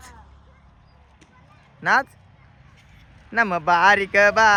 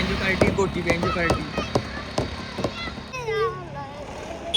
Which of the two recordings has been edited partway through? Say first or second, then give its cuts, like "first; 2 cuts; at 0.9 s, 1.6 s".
second; 1 cut; at 3.1 s